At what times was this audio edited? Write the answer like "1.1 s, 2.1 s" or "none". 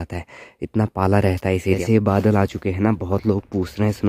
1.8 s